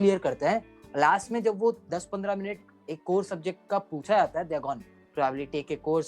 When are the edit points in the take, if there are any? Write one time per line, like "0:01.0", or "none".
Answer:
0:05.0